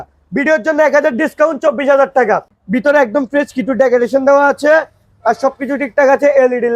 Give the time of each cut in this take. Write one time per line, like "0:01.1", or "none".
0:02.5